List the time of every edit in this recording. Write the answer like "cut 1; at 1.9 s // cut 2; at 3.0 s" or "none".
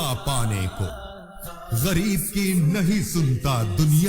cut 1; at 0.9 s